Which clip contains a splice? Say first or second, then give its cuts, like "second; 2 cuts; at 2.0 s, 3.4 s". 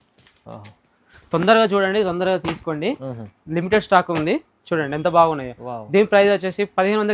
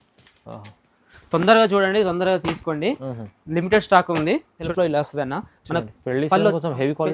second; 1 cut; at 4.6 s